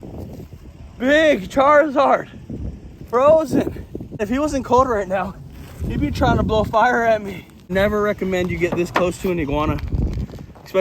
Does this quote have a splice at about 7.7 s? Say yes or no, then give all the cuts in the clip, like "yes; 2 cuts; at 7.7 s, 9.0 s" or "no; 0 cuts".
yes; 2 cuts; at 4.2 s, 7.7 s